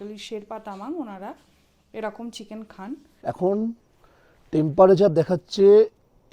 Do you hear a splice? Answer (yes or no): yes